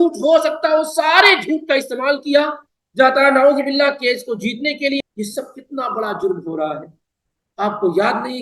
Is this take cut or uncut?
cut